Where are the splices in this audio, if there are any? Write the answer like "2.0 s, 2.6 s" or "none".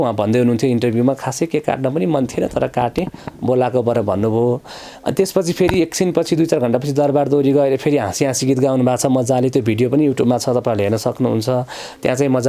none